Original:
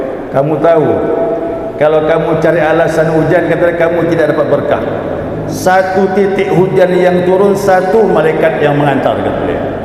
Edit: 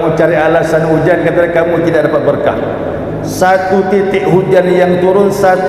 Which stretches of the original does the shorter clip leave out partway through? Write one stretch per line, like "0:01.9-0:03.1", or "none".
none